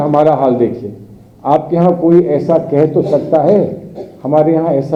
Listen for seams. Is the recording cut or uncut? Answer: uncut